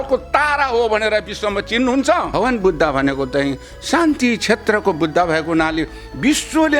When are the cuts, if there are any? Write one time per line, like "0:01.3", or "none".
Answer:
0:02.3

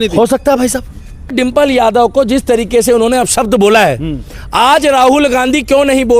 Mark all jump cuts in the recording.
0:01.3

